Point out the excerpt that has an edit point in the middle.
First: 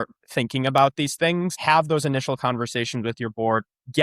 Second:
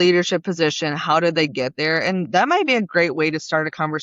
first; 1 cut; at 1.5 s

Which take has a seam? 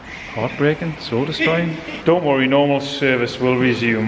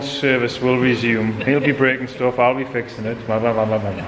first; 1 cut; at 1.9 s

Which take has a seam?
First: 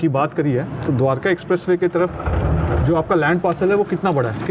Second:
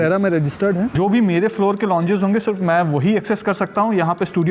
second; 1 cut; at 0.9 s

